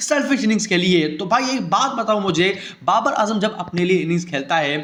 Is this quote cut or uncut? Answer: uncut